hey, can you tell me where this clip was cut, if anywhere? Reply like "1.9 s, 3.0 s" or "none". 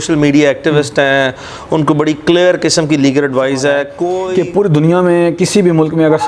4.2 s